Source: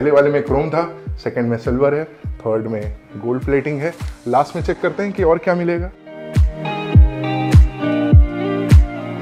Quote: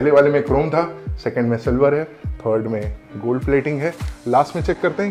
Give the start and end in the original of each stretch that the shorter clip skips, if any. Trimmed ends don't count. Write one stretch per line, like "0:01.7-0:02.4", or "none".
none